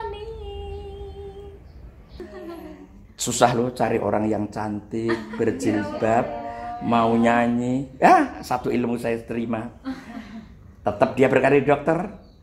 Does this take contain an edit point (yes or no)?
yes